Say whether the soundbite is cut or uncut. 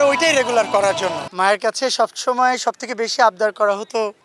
cut